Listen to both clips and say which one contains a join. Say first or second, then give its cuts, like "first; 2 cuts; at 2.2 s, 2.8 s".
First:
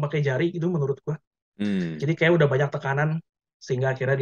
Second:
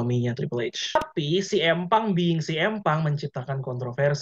second; 1 cut; at 1.0 s